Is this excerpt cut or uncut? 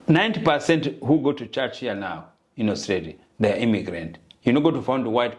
uncut